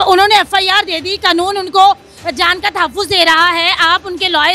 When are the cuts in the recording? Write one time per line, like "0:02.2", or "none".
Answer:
none